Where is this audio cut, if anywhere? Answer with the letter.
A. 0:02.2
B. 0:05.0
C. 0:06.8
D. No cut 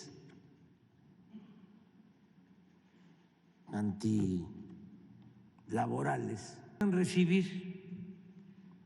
C